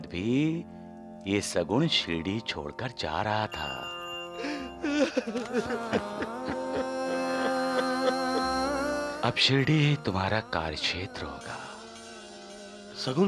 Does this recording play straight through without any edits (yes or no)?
no